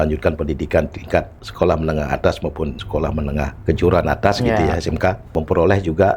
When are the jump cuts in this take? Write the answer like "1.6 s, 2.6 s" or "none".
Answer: 1.4 s, 2.8 s, 3.6 s, 5.3 s